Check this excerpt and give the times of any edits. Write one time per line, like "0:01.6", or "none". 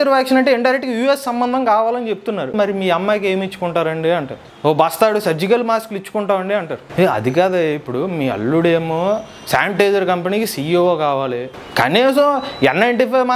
0:02.5
0:04.4
0:11.5

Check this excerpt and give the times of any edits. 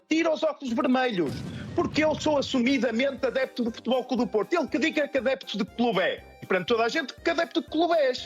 0:06.4

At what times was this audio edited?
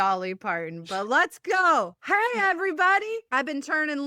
0:02.0
0:03.2

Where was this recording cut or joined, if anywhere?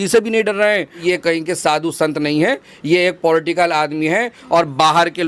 0:01.0

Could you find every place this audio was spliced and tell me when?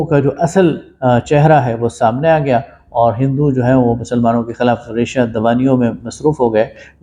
none

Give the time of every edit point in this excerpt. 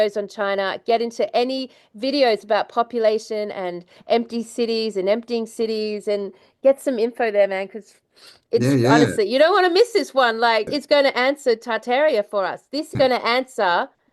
0:10.7
0:12.9

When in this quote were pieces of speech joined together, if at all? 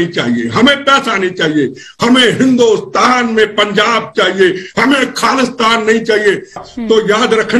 0:06.6

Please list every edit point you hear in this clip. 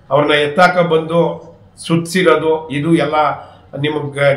none

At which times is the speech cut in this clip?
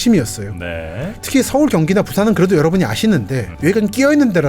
0:03.4

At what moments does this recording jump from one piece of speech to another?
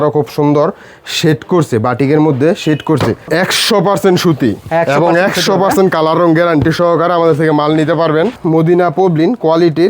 0:03.2
0:08.4

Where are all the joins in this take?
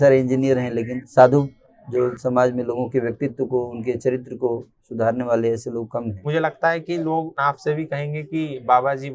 0:01.0
0:02.2
0:06.2
0:07.3

